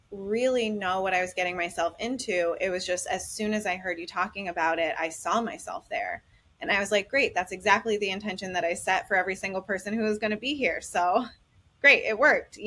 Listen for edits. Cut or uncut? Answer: uncut